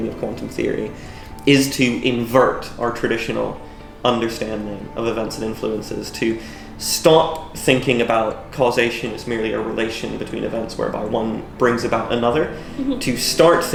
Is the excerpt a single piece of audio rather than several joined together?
yes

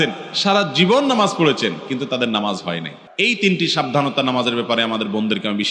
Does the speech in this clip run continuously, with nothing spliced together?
no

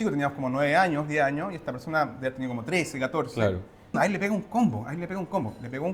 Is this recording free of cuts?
no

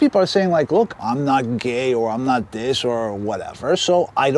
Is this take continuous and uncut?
no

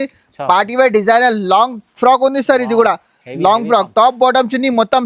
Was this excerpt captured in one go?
yes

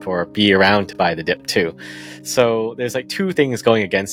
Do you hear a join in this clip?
no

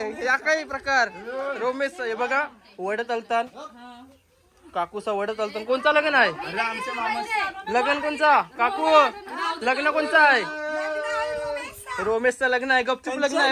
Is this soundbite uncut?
yes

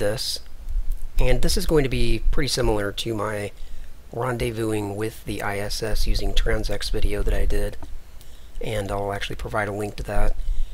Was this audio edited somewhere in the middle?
yes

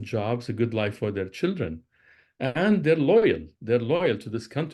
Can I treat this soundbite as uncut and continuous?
yes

